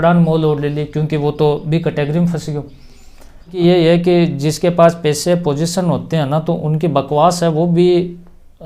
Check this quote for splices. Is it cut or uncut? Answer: cut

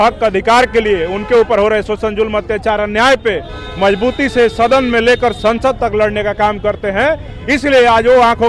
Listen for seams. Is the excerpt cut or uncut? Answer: uncut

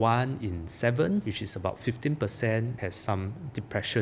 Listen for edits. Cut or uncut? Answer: cut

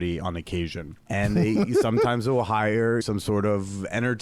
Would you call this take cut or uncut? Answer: cut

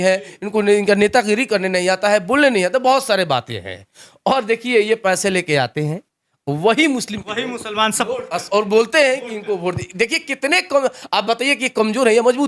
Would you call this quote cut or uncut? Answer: uncut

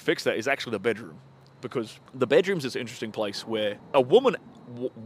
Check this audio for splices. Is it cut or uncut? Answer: cut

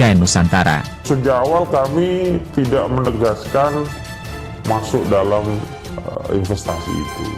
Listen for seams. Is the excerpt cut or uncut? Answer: cut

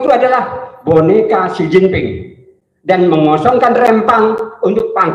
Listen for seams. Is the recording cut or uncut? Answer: uncut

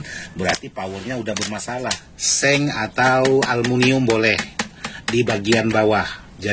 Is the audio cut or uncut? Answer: cut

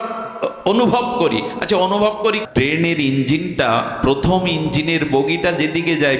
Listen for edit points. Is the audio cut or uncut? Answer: cut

